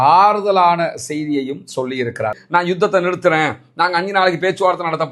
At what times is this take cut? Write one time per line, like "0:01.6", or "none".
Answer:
0:02.4

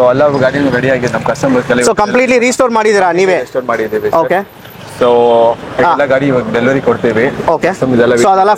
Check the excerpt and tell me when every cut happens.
none

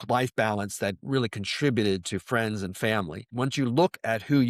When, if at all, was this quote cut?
0:01.0
0:03.3

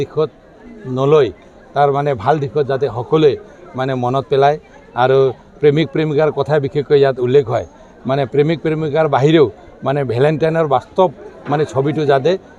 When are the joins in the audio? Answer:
none

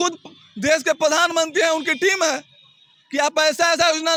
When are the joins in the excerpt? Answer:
none

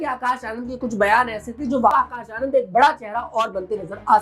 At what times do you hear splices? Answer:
0:01.9

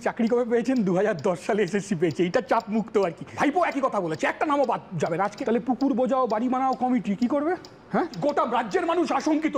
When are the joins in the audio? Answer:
0:03.3
0:05.4
0:08.2

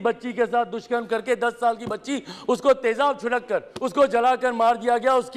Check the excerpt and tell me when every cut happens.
0:03.8

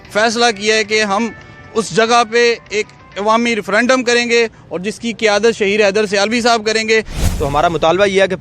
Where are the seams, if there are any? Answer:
0:07.2

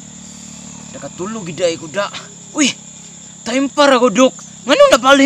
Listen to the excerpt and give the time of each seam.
none

